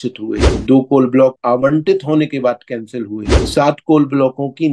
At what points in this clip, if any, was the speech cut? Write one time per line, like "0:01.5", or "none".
none